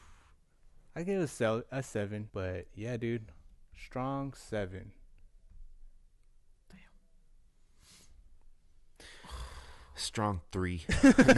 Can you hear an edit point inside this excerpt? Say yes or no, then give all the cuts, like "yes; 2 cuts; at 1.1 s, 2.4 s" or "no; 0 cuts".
yes; 1 cut; at 2.2 s